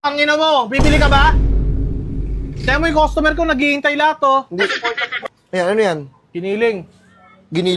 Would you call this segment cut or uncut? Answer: cut